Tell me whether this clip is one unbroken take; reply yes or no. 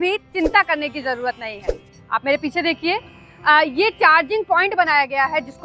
yes